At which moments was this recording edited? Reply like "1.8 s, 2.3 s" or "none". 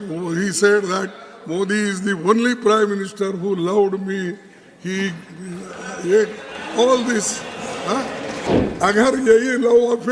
8.5 s